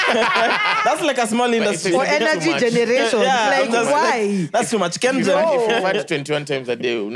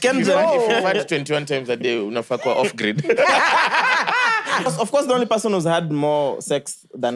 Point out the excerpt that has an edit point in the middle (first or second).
second